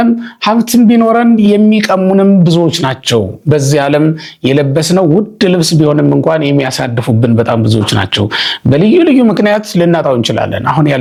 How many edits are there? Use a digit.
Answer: 0